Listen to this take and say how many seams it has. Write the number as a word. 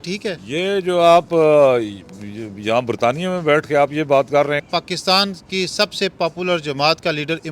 one